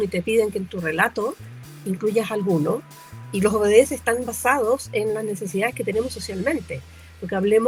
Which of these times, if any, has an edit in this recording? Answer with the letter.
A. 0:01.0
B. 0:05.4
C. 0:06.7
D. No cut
D